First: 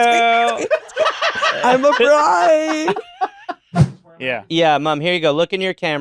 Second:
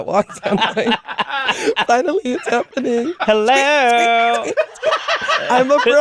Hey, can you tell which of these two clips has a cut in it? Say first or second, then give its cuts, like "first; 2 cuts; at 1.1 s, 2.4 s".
first; 1 cut; at 3.7 s